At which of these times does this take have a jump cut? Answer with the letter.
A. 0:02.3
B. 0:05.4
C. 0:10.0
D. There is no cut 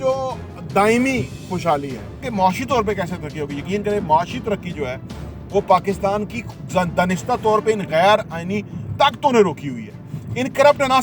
A